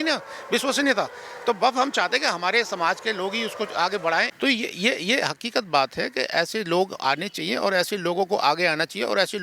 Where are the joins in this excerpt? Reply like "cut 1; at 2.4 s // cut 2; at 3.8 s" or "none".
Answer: cut 1; at 4.3 s